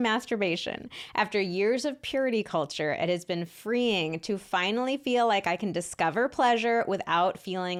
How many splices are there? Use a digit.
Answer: 0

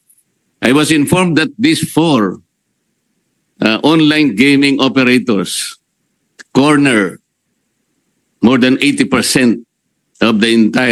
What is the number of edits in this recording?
0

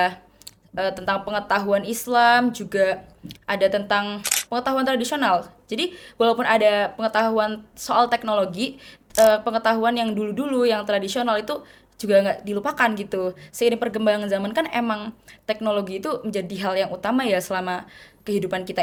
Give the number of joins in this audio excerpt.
0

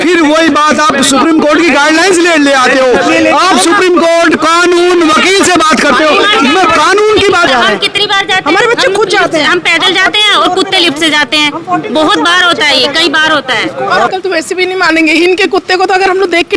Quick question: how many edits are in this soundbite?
2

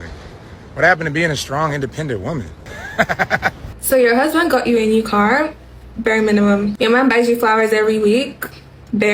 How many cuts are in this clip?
1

